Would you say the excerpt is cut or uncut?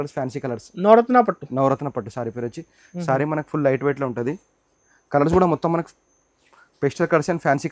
uncut